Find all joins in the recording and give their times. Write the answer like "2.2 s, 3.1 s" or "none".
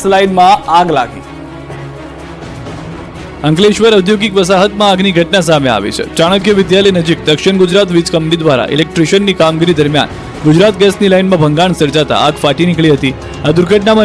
7.7 s